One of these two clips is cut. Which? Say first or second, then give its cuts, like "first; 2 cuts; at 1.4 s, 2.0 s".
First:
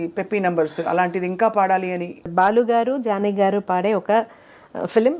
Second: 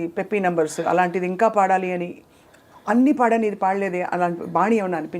first; 1 cut; at 2.3 s